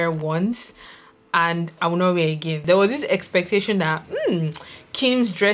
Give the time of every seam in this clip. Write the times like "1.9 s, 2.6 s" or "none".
2.6 s